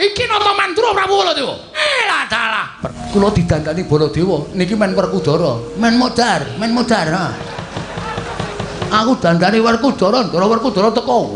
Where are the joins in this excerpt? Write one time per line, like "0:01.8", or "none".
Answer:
0:01.7
0:03.0